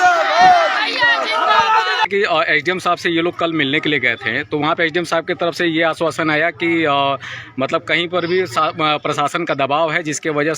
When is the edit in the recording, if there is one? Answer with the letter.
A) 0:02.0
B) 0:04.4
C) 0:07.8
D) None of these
A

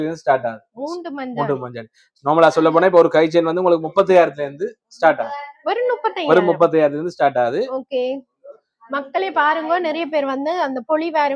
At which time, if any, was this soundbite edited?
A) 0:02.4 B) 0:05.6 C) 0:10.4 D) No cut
D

